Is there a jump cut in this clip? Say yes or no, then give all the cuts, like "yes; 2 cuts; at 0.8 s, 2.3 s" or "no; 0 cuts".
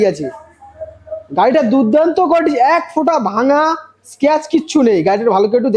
no; 0 cuts